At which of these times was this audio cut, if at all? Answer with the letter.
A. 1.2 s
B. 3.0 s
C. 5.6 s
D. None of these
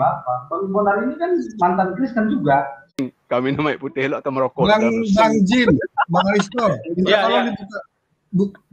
B